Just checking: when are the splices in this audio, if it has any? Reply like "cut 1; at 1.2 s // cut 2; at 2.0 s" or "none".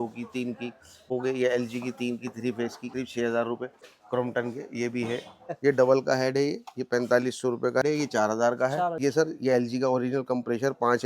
cut 1; at 1.1 s // cut 2; at 2.9 s // cut 3; at 3.9 s // cut 4; at 5.5 s // cut 5; at 7.8 s // cut 6; at 9.0 s